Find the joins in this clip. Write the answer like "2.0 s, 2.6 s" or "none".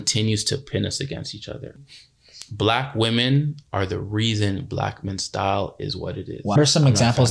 1.8 s, 6.6 s